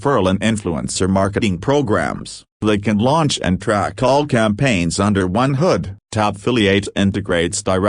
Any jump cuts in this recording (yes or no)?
no